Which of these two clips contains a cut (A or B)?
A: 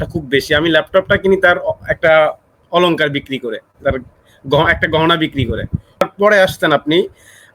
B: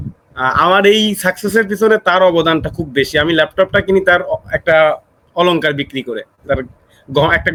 A